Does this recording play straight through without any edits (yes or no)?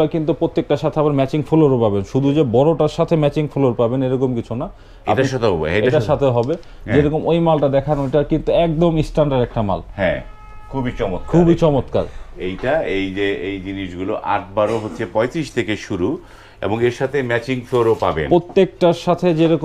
yes